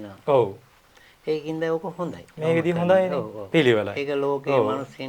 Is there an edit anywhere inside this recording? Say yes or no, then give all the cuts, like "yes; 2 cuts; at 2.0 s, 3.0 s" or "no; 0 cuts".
no; 0 cuts